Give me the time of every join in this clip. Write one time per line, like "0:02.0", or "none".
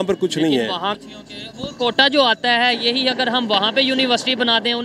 0:00.9

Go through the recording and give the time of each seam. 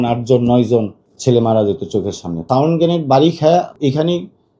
0:02.3
0:03.7

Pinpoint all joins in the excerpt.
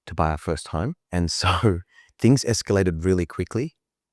0:01.0

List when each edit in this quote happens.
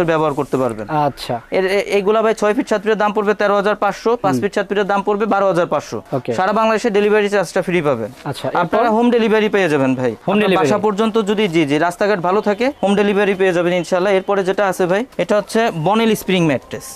none

